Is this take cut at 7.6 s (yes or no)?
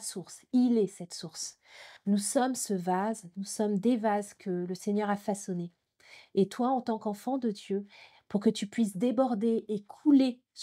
no